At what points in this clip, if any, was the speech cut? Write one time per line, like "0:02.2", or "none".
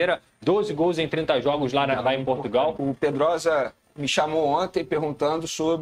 0:02.8